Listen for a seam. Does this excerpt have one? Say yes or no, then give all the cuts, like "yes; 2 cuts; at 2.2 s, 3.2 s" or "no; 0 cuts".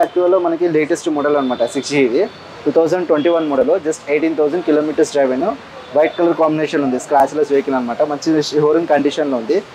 no; 0 cuts